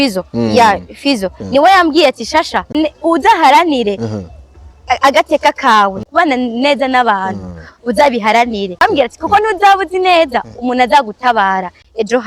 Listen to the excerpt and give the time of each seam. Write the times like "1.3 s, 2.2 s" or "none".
2.8 s, 6.0 s, 8.8 s